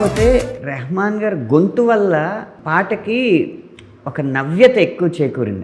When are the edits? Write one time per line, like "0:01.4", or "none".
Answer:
0:02.6

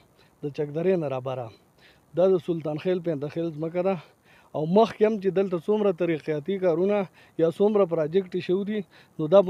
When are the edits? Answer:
none

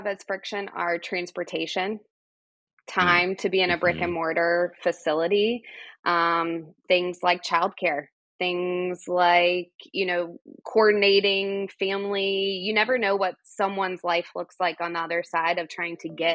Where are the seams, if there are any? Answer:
none

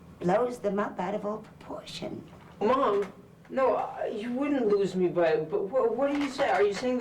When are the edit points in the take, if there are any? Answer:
0:02.6

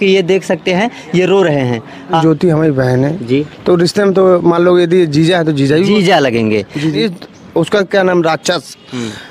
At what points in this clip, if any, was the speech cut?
0:02.2
0:07.0

